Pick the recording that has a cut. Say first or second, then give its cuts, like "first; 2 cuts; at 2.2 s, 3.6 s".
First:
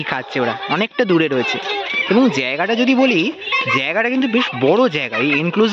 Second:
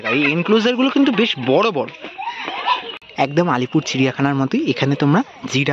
second; 1 cut; at 3.3 s